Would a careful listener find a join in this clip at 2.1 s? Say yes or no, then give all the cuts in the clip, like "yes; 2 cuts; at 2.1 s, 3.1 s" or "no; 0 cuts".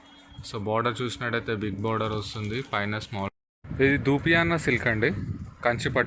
no; 1 cut; at 3.3 s